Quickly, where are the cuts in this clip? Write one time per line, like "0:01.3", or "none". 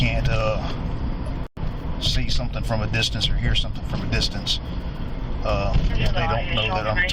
none